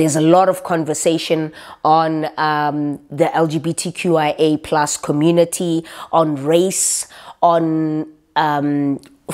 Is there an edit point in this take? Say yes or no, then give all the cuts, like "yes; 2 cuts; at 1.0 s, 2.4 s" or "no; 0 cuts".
no; 0 cuts